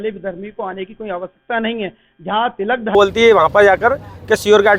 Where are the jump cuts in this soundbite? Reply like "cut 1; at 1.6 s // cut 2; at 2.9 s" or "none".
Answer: cut 1; at 2.9 s